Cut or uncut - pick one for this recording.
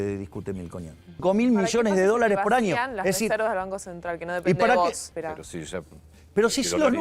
cut